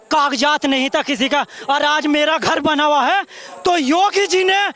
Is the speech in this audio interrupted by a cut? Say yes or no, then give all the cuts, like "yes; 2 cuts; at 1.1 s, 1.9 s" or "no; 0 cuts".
no; 0 cuts